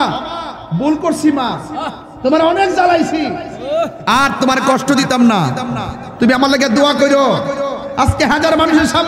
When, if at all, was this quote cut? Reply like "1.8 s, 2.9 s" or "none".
none